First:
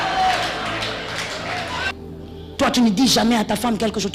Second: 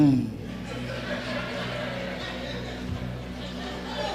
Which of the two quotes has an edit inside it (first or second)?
first